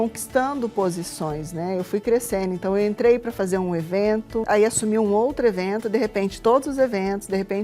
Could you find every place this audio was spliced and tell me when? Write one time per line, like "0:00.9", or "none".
0:04.5